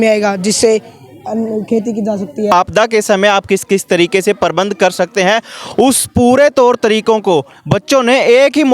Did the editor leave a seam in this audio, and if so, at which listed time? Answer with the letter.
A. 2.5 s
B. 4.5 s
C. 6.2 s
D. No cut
A